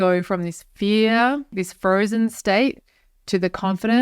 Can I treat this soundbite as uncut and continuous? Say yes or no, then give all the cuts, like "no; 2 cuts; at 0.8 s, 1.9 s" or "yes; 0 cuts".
no; 1 cut; at 1.5 s